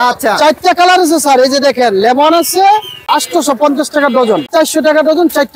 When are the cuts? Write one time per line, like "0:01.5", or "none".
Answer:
0:03.1
0:04.5